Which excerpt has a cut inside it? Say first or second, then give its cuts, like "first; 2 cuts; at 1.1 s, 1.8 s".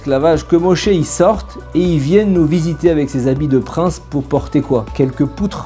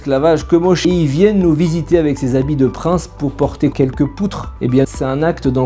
second; 3 cuts; at 0.8 s, 3.7 s, 4.9 s